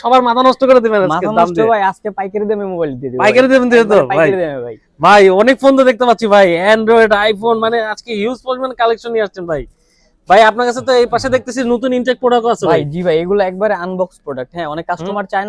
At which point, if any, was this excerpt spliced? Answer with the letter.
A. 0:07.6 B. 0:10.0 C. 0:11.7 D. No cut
D